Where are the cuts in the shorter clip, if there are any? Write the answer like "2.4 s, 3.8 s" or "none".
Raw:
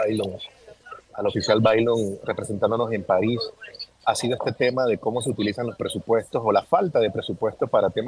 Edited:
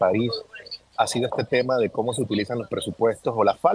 none